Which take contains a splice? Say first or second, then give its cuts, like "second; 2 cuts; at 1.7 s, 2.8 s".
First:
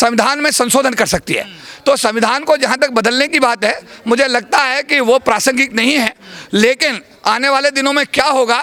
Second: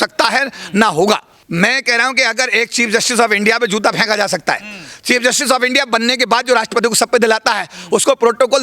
second; 1 cut; at 1.4 s